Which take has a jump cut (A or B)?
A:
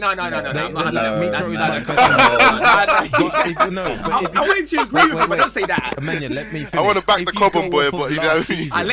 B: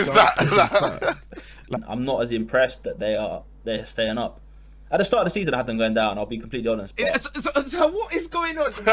B